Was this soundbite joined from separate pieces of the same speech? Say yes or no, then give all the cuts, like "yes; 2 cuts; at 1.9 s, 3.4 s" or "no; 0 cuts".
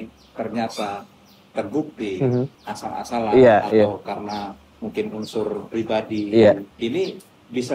yes; 2 cuts; at 2.6 s, 6.7 s